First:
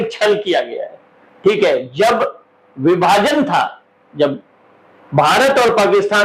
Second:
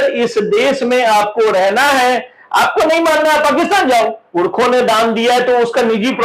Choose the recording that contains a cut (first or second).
second